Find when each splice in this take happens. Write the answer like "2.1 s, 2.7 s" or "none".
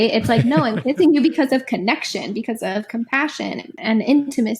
3.7 s